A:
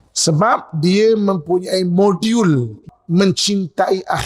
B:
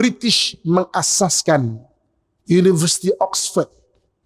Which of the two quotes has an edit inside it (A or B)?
A